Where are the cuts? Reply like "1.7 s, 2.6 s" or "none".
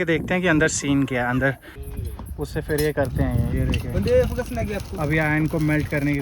1.8 s